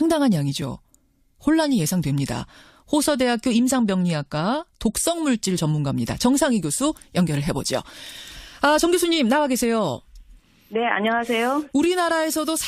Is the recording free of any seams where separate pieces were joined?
no; 1 cut; at 5.8 s

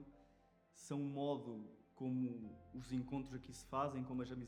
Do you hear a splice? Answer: no; 0 cuts

